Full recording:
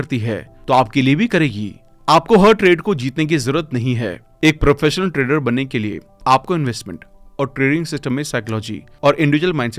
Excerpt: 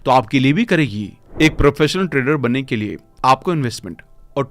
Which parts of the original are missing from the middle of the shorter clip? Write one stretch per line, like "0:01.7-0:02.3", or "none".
0:01.8-0:04.2